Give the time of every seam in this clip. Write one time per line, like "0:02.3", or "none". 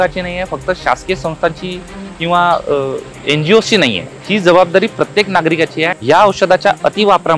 0:03.1
0:04.1
0:06.0